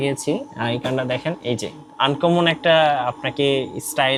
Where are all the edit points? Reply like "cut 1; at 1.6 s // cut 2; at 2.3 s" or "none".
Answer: none